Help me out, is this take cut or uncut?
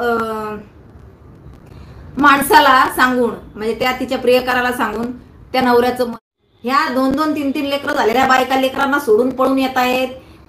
cut